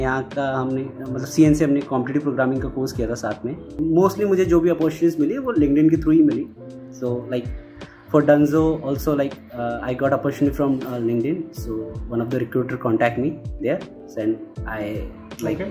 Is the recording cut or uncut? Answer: cut